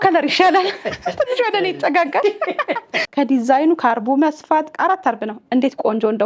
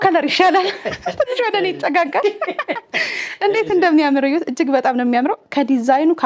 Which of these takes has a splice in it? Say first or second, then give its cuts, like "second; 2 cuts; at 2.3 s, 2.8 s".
first; 1 cut; at 3.0 s